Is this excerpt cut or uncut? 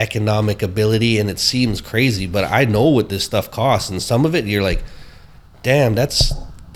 uncut